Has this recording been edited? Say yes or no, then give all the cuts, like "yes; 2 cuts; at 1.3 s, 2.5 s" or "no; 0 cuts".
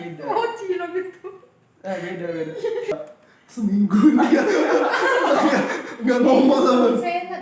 yes; 1 cut; at 2.9 s